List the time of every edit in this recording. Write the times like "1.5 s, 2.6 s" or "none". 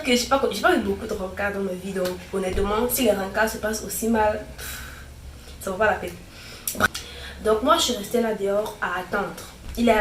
6.9 s